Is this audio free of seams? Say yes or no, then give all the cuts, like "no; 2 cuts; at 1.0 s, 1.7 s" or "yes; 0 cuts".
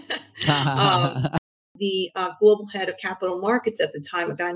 no; 1 cut; at 1.6 s